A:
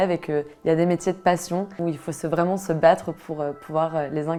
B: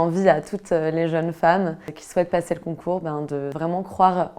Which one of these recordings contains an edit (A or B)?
B